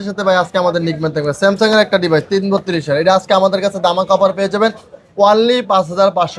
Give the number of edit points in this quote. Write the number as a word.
zero